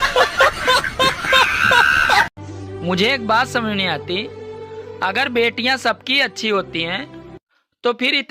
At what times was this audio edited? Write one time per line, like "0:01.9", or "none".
0:02.4